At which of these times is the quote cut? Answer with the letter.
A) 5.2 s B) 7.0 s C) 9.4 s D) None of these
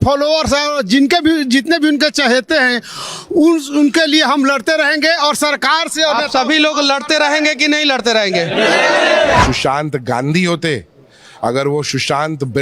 C